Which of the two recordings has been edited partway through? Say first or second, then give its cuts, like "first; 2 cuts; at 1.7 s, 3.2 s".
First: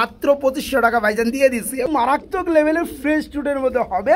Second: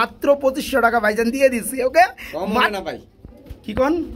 first; 1 cut; at 1.9 s